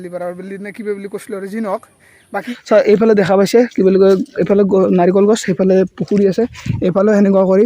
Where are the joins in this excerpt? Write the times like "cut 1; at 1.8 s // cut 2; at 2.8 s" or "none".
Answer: cut 1; at 2.4 s